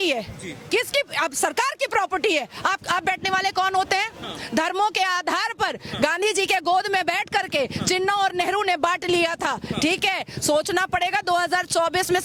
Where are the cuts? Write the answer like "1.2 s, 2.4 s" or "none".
none